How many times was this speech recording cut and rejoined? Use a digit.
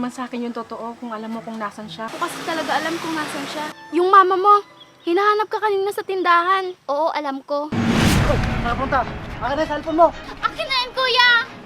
4